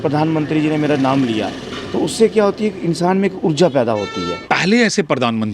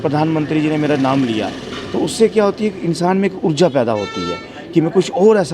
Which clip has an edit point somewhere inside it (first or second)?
first